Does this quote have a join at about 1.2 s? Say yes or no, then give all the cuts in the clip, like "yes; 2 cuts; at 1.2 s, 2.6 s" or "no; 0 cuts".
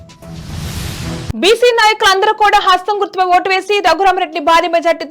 yes; 1 cut; at 1.2 s